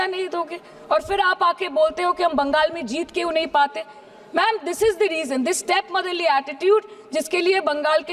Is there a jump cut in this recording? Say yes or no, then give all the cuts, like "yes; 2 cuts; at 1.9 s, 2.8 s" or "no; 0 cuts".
no; 0 cuts